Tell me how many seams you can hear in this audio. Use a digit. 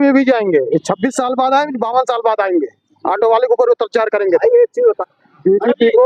1